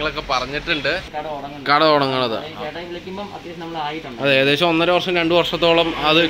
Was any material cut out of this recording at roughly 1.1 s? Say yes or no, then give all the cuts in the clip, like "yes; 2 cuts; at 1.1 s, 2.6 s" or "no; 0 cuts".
yes; 1 cut; at 1.1 s